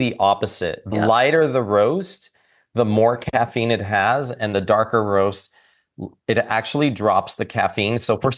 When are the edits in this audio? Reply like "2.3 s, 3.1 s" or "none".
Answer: 0.9 s

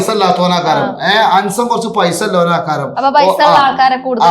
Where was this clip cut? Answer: none

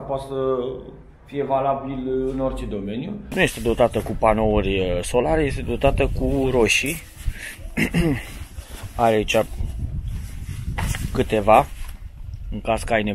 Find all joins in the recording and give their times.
3.3 s

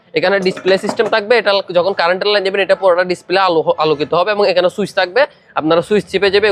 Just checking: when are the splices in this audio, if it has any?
none

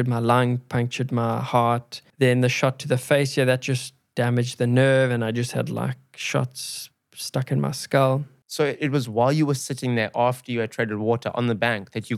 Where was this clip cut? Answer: 2.0 s, 8.4 s

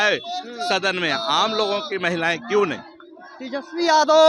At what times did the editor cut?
none

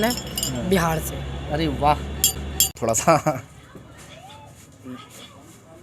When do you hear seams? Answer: 2.7 s

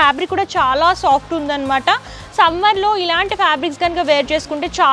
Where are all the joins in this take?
none

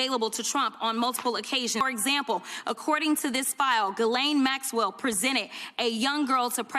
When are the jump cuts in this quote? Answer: 1.8 s

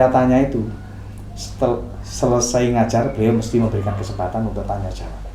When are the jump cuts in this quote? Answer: none

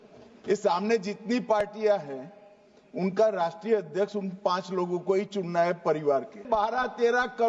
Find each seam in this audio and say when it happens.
6.5 s

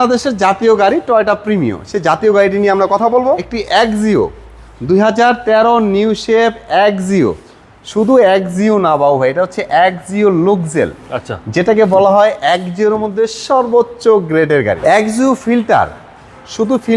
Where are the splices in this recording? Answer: 3.5 s, 14.8 s

